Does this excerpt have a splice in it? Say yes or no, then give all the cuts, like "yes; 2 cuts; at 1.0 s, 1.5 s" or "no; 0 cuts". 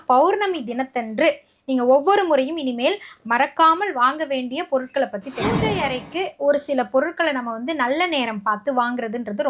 yes; 1 cut; at 5.6 s